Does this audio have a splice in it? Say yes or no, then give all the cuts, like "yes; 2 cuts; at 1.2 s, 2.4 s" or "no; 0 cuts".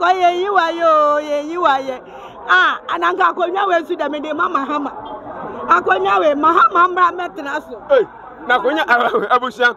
no; 0 cuts